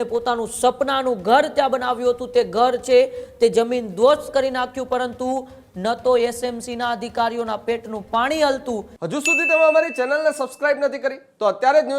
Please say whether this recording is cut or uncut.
cut